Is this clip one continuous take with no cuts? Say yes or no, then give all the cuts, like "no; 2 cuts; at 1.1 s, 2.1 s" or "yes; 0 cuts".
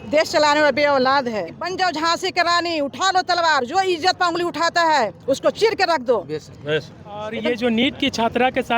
no; 2 cuts; at 1.6 s, 7.4 s